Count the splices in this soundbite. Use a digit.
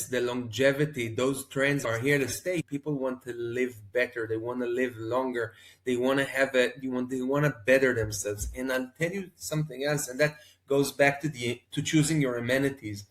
1